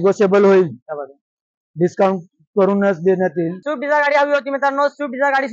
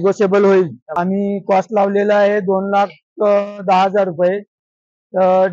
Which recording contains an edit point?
second; 1 cut; at 1.0 s

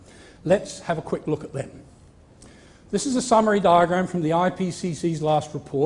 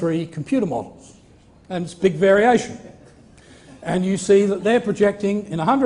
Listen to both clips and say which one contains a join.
first; 1 cut; at 4.7 s

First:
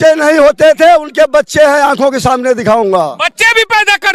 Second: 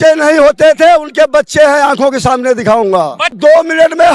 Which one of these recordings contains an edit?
second; 1 cut; at 3.2 s

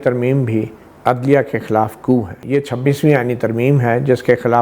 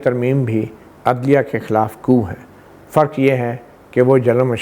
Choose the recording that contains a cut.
first; 1 cut; at 2.4 s

